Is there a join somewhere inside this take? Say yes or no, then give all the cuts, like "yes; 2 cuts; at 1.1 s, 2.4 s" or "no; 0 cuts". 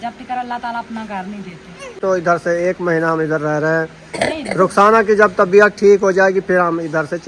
yes; 1 cut; at 2.0 s